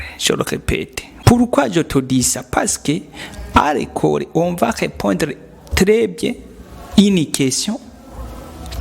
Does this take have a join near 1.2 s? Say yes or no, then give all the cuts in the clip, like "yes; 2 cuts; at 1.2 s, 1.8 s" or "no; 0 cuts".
yes; 1 cut; at 1.2 s